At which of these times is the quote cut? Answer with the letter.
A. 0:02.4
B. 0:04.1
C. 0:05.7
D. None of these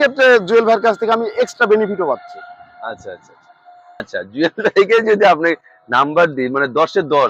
B